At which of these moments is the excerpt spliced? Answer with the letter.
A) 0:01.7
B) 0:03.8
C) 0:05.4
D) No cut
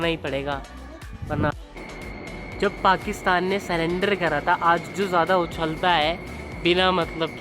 A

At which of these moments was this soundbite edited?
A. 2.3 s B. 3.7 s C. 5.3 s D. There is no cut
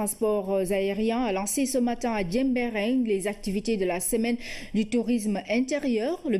D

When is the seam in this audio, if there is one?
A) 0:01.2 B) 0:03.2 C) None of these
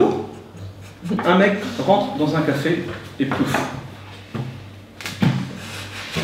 A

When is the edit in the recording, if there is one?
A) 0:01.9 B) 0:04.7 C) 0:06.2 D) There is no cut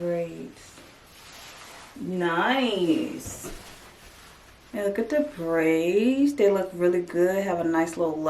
A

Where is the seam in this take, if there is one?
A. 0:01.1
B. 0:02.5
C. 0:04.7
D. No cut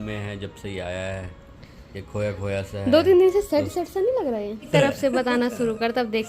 C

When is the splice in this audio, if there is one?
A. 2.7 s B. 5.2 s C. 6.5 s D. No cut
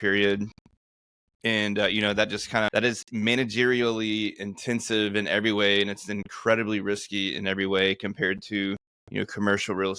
A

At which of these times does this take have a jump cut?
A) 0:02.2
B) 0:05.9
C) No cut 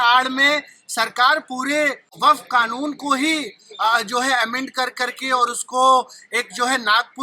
A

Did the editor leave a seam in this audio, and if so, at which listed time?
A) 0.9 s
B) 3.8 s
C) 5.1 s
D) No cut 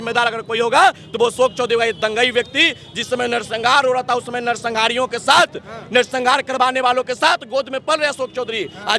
D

